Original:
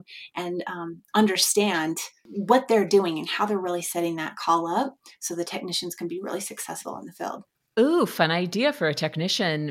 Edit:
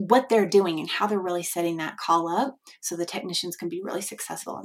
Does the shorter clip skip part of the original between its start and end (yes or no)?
no